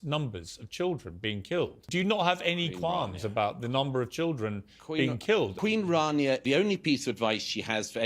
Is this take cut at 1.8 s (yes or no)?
yes